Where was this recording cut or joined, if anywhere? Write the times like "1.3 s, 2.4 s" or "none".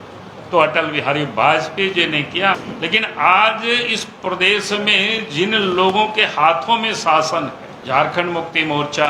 2.6 s, 7.7 s